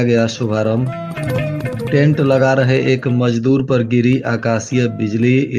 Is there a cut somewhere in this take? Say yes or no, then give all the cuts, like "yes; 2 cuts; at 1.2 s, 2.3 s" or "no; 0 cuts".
no; 0 cuts